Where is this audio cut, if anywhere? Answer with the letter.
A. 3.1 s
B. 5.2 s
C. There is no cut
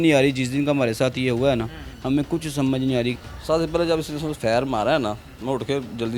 A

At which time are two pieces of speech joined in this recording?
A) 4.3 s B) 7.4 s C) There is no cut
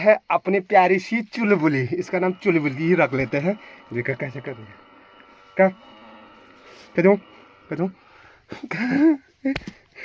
C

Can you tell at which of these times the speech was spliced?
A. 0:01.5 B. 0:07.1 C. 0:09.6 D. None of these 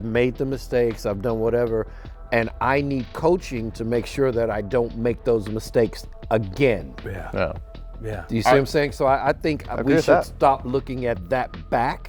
D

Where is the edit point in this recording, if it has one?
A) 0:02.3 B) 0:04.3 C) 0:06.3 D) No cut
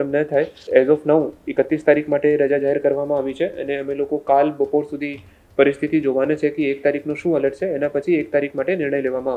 D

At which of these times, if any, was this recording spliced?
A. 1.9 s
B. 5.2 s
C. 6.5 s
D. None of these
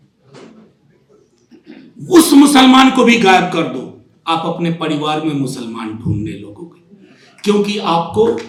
D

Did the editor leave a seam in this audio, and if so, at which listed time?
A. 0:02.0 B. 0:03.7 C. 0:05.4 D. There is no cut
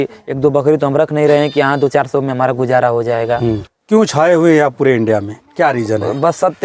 B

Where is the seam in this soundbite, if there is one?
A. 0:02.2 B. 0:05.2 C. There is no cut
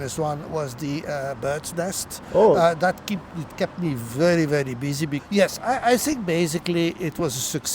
B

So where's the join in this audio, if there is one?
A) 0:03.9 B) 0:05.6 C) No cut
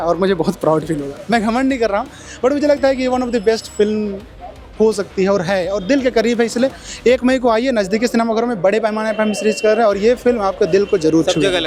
C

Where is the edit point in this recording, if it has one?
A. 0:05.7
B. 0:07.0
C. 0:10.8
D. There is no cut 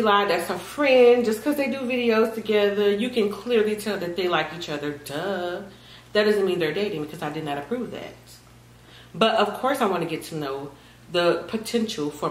D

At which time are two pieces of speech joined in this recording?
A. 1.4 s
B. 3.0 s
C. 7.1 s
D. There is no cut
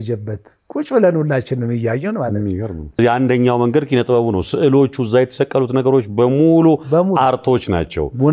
B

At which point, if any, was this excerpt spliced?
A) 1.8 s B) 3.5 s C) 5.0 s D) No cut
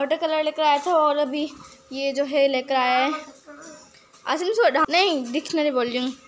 C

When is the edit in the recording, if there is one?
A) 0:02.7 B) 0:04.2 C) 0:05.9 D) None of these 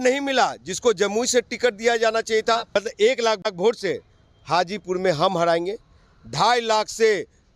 A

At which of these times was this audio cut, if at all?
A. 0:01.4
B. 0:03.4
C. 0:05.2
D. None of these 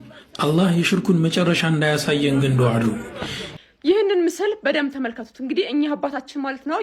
B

